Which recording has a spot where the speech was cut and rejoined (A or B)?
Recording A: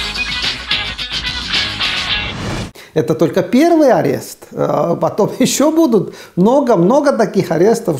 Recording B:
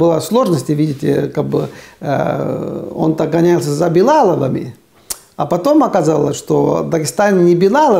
A